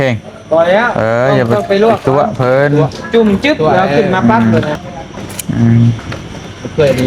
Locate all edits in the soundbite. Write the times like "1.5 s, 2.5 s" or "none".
4.7 s